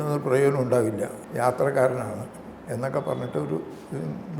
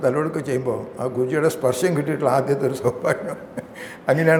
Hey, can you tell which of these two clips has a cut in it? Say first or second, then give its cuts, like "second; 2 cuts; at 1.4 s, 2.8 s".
first; 1 cut; at 1.2 s